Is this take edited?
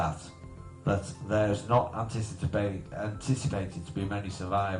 yes; 1 cut; at 2.9 s

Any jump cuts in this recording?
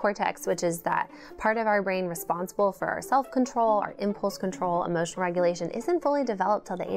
no; 0 cuts

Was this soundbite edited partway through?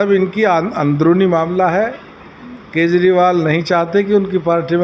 no; 0 cuts

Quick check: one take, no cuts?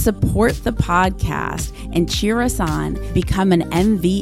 yes; 0 cuts

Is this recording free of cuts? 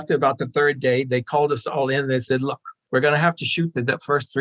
yes; 0 cuts

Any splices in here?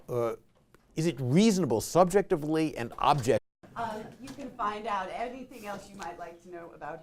no; 0 cuts

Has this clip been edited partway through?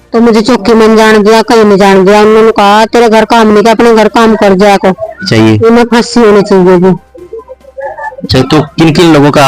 yes; 1 cut; at 5.3 s

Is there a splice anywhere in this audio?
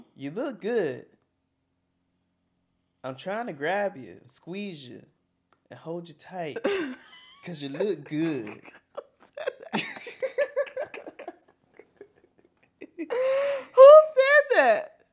no; 0 cuts

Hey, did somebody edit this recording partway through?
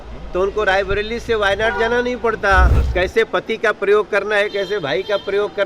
yes; 1 cut; at 2.8 s

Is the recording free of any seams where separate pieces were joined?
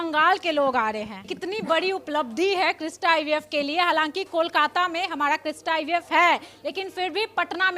no; 1 cut; at 1.3 s

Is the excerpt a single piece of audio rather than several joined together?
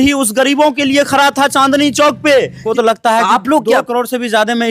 no; 1 cut; at 2.6 s

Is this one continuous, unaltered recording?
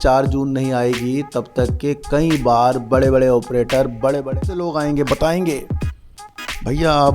no; 1 cut; at 4.7 s

